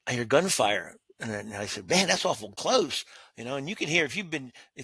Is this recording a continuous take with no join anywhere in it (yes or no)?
no